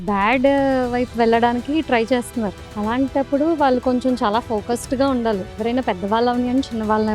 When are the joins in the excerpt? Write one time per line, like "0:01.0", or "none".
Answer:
0:05.6